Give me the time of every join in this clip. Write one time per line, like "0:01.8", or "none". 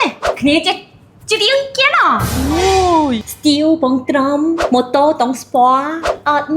0:03.3
0:04.6